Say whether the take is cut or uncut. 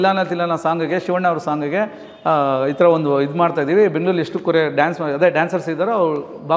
uncut